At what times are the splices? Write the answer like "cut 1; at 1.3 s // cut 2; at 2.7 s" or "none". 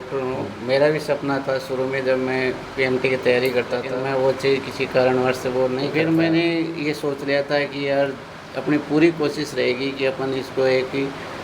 cut 1; at 3.9 s // cut 2; at 5.9 s